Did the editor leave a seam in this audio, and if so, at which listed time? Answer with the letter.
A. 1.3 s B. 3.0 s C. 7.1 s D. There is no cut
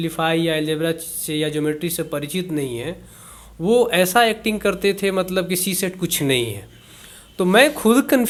D